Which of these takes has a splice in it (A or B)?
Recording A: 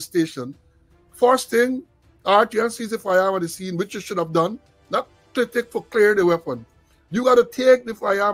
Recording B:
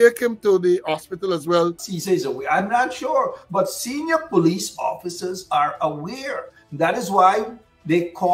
B